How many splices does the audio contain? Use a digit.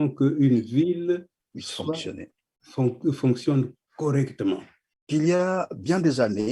1